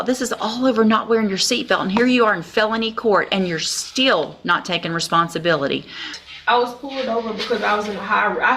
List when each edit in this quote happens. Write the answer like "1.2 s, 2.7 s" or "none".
6.2 s